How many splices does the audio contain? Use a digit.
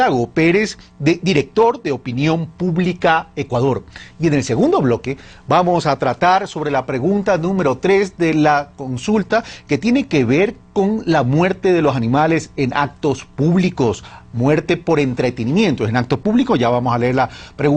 1